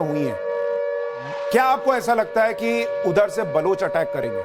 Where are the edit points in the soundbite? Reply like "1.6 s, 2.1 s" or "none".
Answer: 1.5 s